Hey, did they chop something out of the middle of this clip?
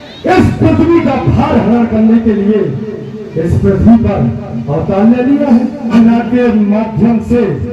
yes; 1 cut; at 5.9 s

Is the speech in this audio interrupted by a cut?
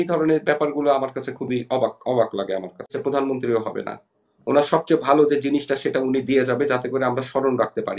yes; 1 cut; at 2.9 s

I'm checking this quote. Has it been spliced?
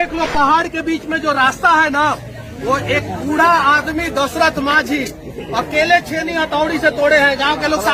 no; 0 cuts

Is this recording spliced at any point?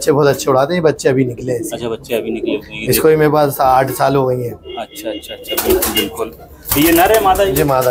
no; 0 cuts

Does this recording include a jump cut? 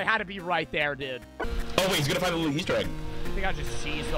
yes; 1 cut; at 1.4 s

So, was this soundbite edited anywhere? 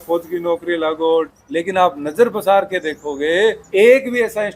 yes; 2 cuts; at 1.4 s, 3.6 s

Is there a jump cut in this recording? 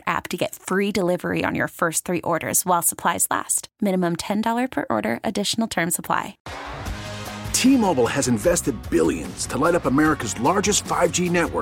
yes; 1 cut; at 6.4 s

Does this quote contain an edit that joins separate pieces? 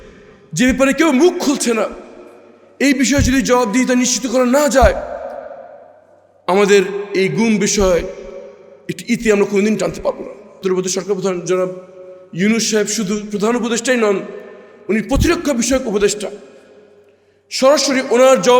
yes; 1 cut; at 10.6 s

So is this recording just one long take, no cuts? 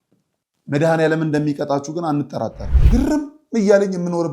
no; 1 cut; at 2.7 s

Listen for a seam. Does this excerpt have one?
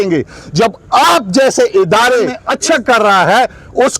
yes; 1 cut; at 2.4 s

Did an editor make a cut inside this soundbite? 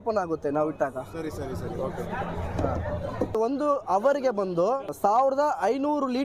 yes; 2 cuts; at 3.4 s, 4.9 s

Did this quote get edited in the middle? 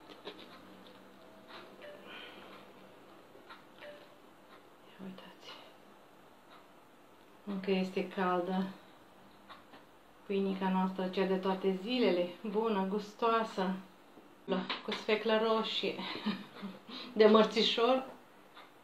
yes; 1 cut; at 14.5 s

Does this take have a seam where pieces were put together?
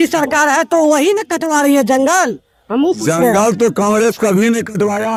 no; 0 cuts

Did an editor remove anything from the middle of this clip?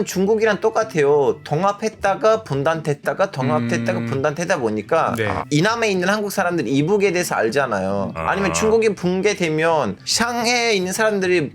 yes; 2 cuts; at 5.4 s, 8.1 s

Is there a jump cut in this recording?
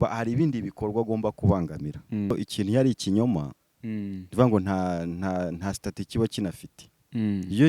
yes; 1 cut; at 2.3 s

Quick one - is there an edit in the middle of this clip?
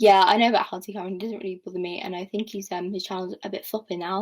no; 0 cuts

